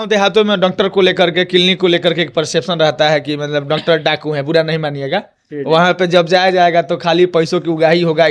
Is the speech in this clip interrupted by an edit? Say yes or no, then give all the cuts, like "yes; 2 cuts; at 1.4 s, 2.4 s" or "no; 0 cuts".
no; 0 cuts